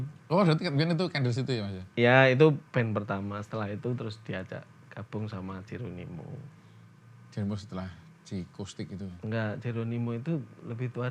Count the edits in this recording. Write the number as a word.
zero